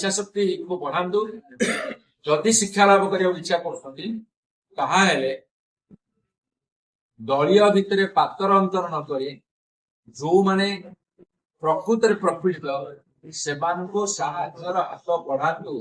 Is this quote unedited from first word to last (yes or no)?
no